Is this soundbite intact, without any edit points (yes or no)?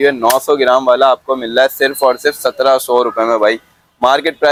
yes